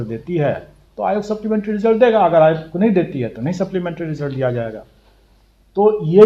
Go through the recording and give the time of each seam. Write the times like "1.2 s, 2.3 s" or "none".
none

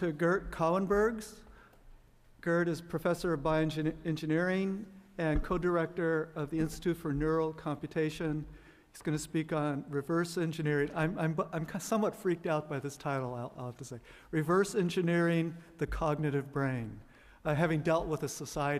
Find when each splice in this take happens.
7.9 s

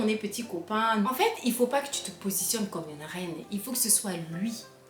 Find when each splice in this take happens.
1.0 s

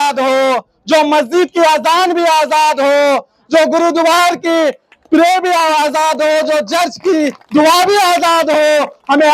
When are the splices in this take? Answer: none

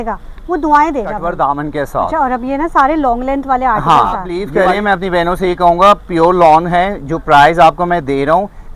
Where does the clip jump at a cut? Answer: 1.3 s, 4.4 s

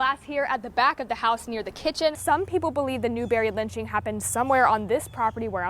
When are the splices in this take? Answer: 2.2 s

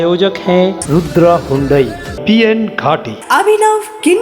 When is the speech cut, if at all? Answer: 2.0 s

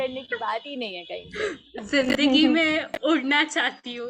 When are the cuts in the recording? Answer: 1.6 s

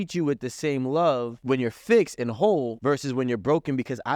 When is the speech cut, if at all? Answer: 1.3 s, 2.7 s

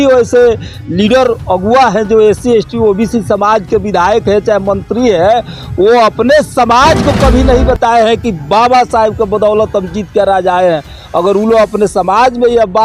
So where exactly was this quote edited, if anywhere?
none

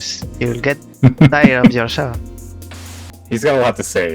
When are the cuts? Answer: 3.0 s

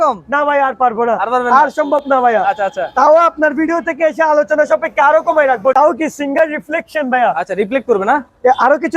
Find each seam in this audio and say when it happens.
5.7 s

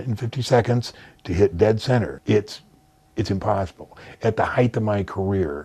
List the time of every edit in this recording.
2.2 s

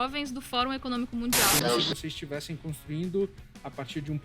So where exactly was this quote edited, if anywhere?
1.5 s

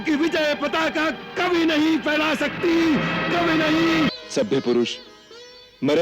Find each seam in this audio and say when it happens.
4.1 s

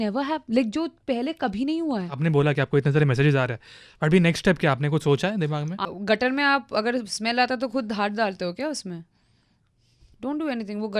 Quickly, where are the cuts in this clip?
2.1 s, 5.9 s

